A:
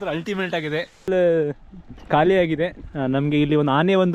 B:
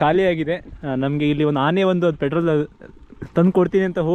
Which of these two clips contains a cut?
A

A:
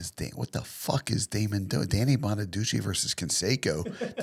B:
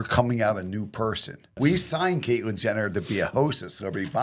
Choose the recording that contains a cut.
B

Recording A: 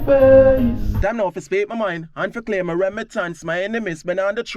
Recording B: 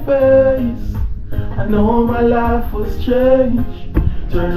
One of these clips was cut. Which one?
A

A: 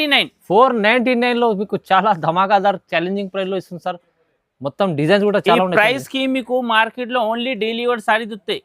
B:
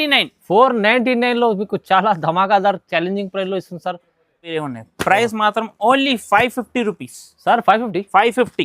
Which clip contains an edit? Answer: B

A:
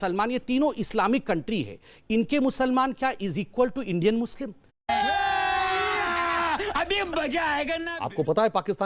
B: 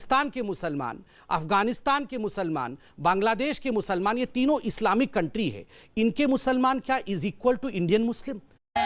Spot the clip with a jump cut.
A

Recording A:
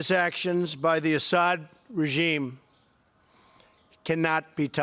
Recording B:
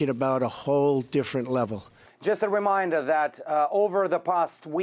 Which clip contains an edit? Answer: A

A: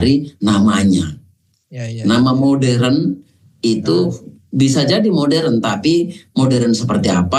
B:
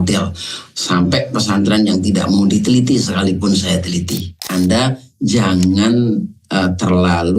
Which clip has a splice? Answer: B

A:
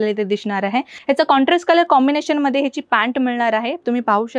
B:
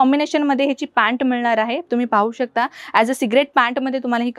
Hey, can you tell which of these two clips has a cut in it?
A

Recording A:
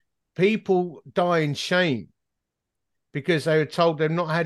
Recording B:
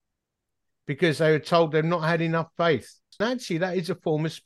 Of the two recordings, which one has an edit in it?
B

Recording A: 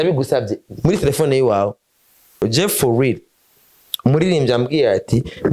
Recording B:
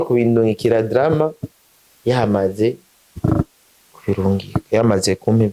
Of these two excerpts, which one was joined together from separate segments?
A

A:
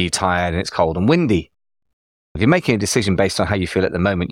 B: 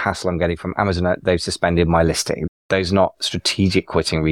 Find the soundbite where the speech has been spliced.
B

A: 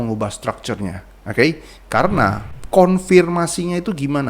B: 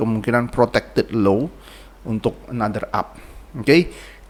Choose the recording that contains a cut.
A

